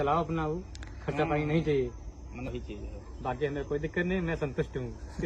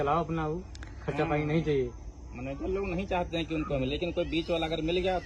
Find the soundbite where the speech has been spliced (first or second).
first